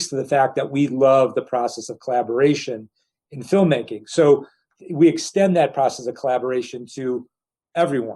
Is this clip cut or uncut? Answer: cut